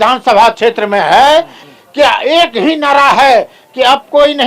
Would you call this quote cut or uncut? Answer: cut